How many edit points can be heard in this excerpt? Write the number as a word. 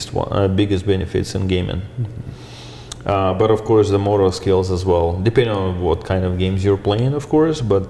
zero